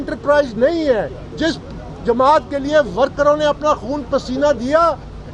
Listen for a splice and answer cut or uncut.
cut